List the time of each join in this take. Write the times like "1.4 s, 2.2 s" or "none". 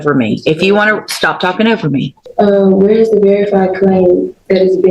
2.2 s